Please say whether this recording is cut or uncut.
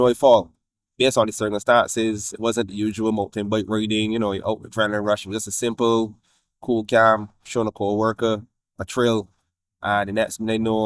uncut